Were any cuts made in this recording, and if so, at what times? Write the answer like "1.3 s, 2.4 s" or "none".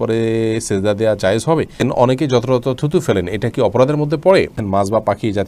1.8 s, 4.6 s